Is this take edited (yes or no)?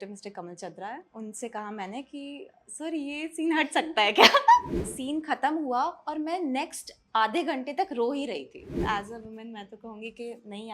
yes